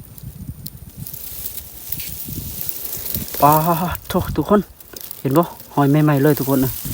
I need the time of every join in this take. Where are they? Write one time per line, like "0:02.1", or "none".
0:03.3